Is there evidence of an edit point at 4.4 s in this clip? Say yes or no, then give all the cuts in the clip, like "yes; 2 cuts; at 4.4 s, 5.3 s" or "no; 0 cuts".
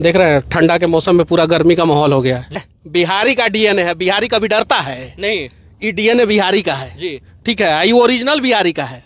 no; 1 cut; at 2.6 s